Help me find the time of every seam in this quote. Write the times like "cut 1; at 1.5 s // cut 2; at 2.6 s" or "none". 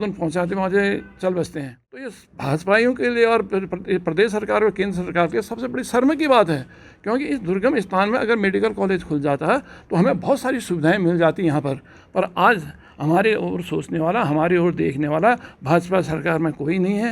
cut 1; at 2.1 s